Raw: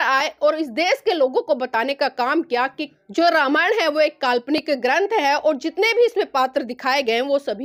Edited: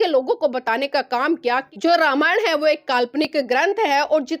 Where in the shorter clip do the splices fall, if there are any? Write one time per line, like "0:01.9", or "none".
0:01.7